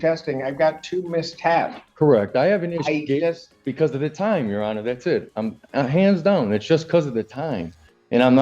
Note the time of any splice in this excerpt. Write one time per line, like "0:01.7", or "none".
none